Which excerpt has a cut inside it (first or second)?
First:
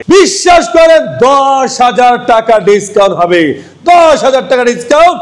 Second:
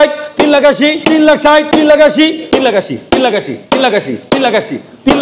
second